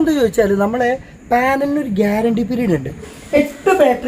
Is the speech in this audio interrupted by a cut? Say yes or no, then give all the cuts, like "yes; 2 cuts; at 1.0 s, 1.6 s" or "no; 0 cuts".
yes; 1 cut; at 3.0 s